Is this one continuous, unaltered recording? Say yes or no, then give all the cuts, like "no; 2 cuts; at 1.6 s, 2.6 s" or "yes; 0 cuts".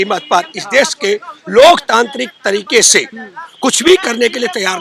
yes; 0 cuts